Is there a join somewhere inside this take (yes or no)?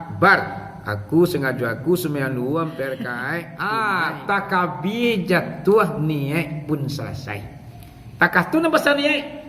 yes